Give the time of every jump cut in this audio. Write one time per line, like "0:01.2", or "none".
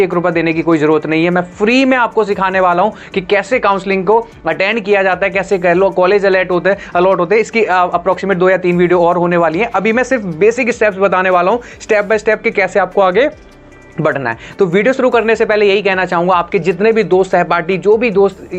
none